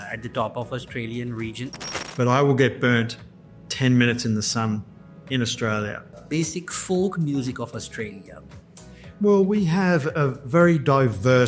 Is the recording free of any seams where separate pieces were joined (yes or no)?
no